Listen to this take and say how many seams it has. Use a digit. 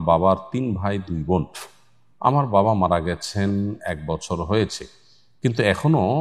0